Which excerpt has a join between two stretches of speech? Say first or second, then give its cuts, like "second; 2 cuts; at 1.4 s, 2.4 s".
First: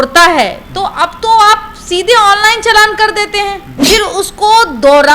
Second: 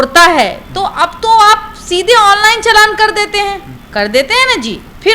first; 1 cut; at 3.7 s